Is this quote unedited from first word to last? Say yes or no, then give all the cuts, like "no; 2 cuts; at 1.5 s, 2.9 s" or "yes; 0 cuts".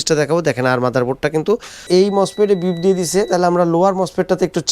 no; 1 cut; at 1.9 s